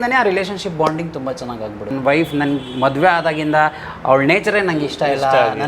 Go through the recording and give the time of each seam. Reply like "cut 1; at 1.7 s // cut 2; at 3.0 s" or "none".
cut 1; at 1.9 s